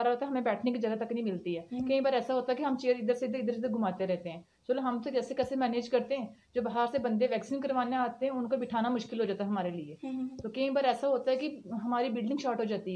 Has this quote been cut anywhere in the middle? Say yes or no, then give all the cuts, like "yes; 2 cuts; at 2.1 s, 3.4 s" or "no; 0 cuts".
no; 0 cuts